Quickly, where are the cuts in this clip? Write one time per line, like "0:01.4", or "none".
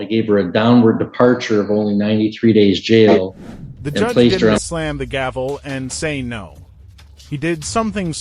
0:04.6